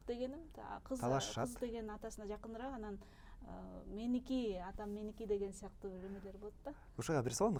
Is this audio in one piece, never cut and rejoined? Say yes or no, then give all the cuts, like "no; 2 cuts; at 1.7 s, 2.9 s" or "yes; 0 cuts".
yes; 0 cuts